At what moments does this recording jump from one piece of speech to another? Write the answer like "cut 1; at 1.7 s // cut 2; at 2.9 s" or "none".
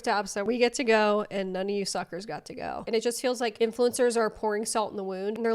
cut 1; at 2.8 s

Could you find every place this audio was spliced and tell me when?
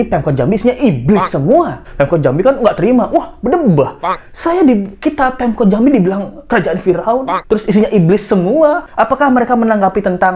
cut 1; at 1.8 s // cut 2; at 8.9 s

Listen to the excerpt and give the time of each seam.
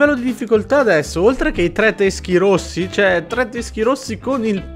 none

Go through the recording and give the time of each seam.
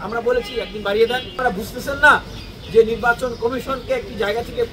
cut 1; at 1.4 s

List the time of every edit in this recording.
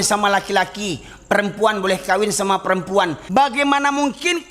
cut 1; at 3.2 s

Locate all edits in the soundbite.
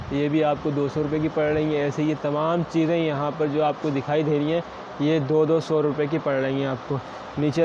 none

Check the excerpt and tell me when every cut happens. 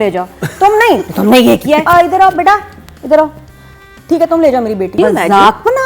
cut 1; at 1.9 s // cut 2; at 5.0 s

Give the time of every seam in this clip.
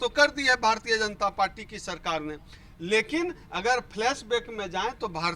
none

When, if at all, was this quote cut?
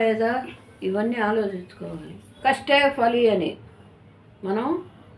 cut 1; at 2.3 s

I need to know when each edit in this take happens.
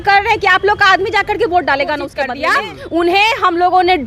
cut 1; at 2.2 s

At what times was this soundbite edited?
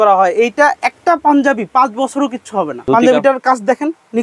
cut 1; at 2.8 s

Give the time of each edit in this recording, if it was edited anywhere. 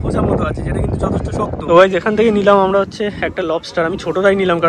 cut 1; at 1.7 s

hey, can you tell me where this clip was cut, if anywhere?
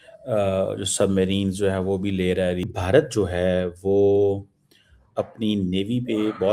cut 1; at 2.7 s

